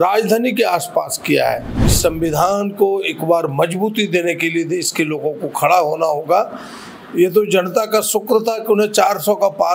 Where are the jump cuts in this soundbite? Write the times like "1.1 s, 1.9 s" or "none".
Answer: 1.9 s